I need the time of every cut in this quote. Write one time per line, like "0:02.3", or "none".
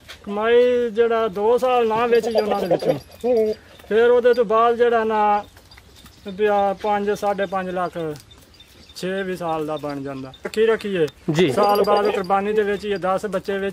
0:10.5